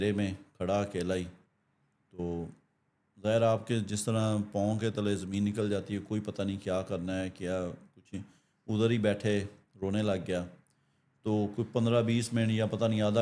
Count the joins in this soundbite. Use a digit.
0